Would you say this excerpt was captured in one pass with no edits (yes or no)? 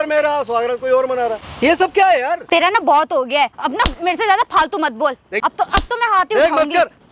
no